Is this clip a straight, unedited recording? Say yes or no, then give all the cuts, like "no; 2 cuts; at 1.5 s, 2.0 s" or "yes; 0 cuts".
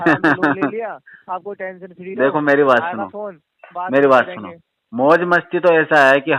yes; 0 cuts